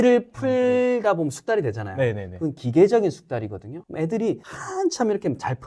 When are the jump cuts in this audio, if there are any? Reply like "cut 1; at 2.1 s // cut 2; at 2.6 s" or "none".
none